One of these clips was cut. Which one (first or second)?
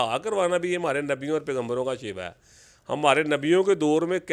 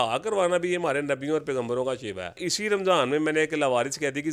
second